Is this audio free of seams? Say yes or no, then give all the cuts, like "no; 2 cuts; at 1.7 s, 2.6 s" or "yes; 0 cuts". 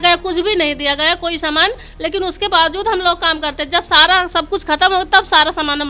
yes; 0 cuts